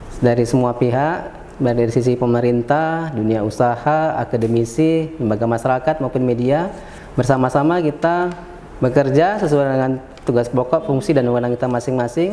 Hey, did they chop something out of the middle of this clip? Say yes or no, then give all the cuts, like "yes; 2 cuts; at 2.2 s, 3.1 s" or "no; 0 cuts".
no; 0 cuts